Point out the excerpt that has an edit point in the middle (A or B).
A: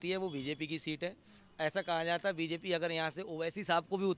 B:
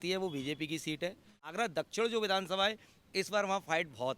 B